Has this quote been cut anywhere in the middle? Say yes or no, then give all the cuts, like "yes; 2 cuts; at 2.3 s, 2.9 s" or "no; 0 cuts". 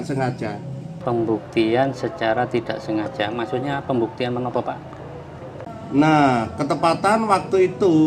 no; 0 cuts